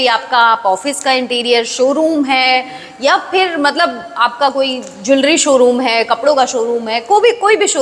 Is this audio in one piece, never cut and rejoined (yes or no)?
yes